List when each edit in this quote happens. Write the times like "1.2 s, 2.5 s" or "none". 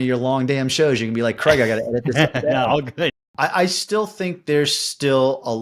3.2 s